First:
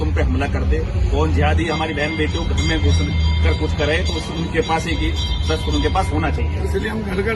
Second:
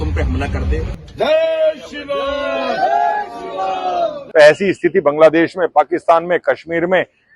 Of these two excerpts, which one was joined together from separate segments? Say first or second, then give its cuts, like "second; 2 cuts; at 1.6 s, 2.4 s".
second; 2 cuts; at 1.0 s, 4.2 s